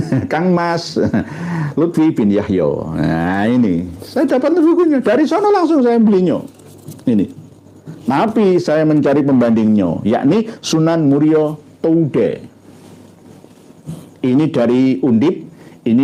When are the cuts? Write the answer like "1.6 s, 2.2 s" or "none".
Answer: none